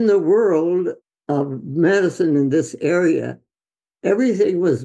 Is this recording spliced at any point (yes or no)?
yes